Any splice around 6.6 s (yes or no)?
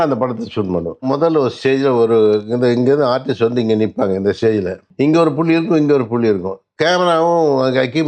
no